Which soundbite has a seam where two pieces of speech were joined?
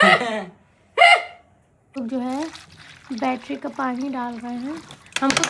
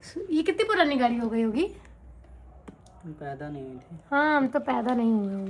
first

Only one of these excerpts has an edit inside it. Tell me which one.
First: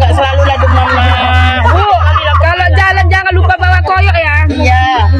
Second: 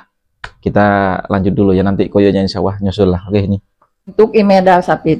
second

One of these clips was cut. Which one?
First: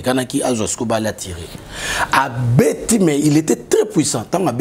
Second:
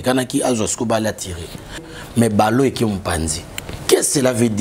second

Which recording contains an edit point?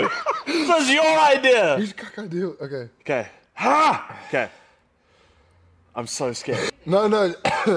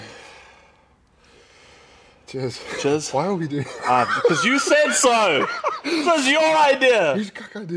first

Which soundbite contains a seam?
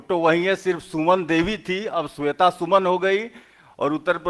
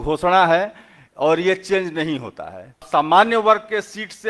second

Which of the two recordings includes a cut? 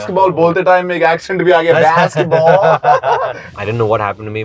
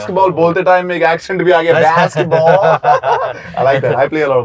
first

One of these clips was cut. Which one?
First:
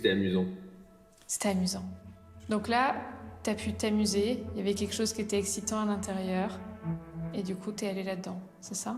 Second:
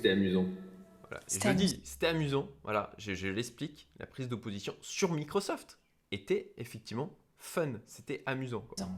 first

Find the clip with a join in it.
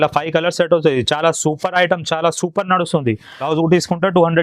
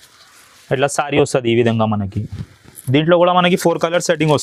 first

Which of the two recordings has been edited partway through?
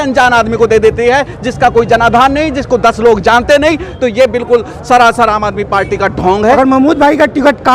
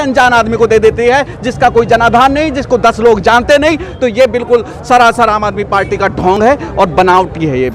first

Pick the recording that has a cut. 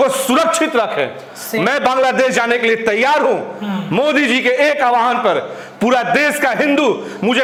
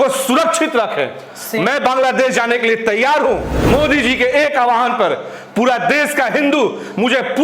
second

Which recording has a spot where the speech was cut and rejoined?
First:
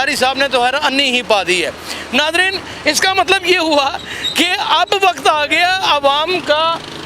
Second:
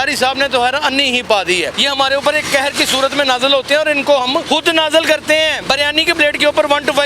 second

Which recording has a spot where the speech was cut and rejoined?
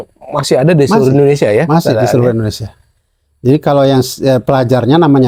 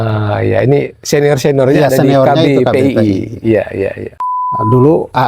second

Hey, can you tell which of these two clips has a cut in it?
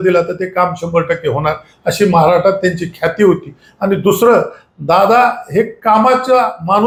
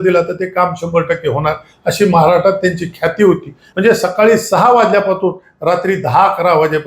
second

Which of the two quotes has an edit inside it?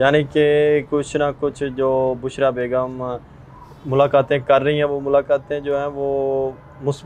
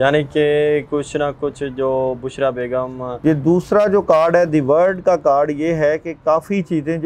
second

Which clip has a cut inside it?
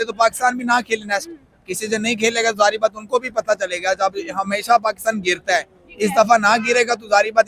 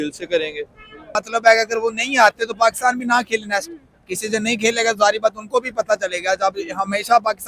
second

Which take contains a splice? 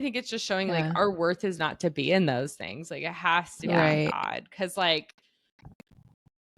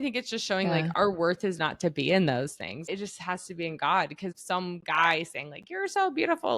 second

